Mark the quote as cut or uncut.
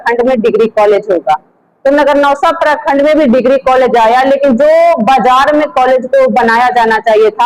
uncut